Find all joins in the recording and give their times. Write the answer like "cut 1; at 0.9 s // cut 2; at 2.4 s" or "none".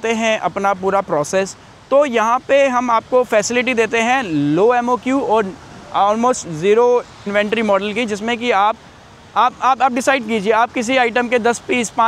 cut 1; at 7.2 s